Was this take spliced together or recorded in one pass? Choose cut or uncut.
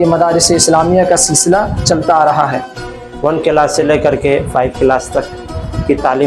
cut